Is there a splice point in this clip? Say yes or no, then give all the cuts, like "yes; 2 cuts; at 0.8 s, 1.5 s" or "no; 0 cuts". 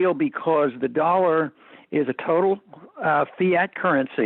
no; 0 cuts